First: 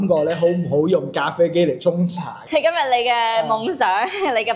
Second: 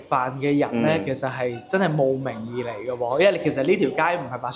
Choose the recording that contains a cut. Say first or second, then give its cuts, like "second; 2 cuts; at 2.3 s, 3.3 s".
first; 1 cut; at 2.4 s